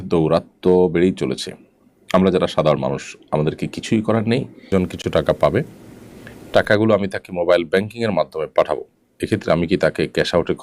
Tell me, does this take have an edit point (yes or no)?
yes